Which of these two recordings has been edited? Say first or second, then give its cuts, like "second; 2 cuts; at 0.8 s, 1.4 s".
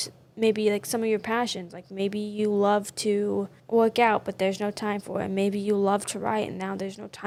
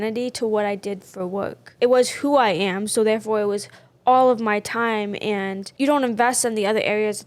second; 2 cuts; at 1.7 s, 5.7 s